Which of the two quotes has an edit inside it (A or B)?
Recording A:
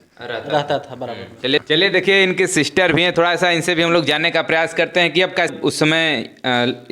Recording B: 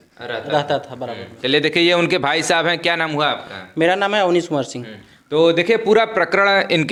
A